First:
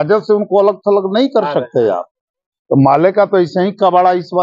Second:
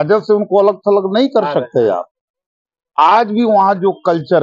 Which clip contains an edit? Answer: first; 1 cut; at 2.5 s

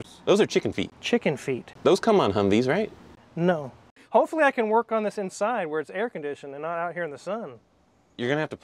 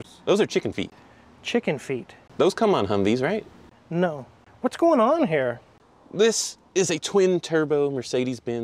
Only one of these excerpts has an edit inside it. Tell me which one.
first; 3 cuts; at 1.0 s, 1.7 s, 4.0 s

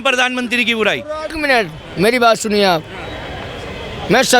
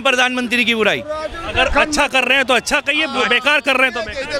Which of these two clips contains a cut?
first; 1 cut; at 1.4 s

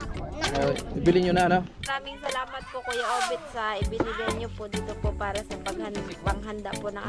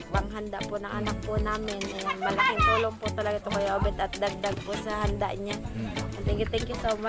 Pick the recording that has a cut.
first; 1 cut; at 1.9 s

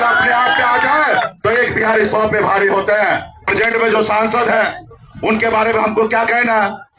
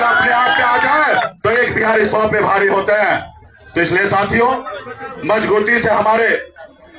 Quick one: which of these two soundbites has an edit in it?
first; 1 cut; at 3.5 s

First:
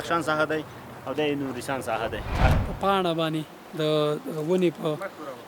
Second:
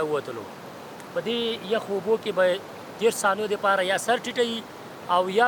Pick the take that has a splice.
first; 1 cut; at 2.5 s

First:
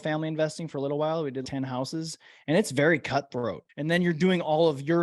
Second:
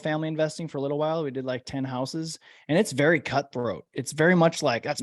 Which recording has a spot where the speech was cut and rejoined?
first; 2 cuts; at 1.4 s, 3.6 s

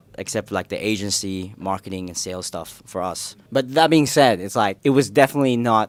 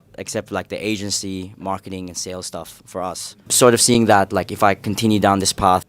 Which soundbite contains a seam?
second; 1 cut; at 3.5 s

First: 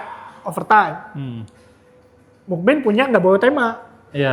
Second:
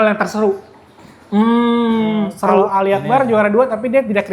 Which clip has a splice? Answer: second; 1 cut; at 2.7 s

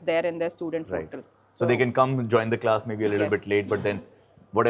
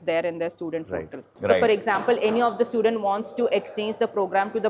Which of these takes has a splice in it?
second; 1 cut; at 1.3 s

